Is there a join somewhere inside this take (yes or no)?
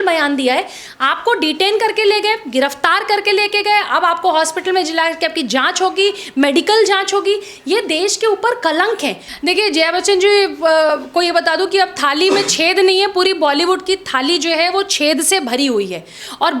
yes